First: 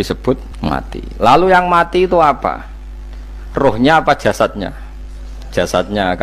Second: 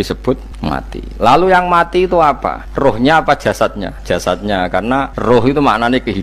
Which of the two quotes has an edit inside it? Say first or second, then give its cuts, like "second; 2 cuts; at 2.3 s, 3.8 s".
second; 3 cuts; at 2.6 s, 3.9 s, 5.1 s